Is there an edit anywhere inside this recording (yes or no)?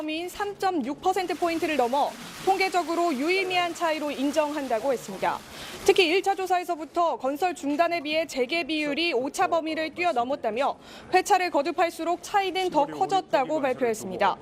no